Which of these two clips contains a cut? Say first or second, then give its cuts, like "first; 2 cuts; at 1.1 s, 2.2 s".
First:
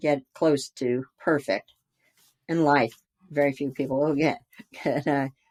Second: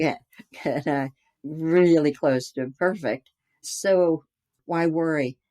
second; 1 cut; at 3.7 s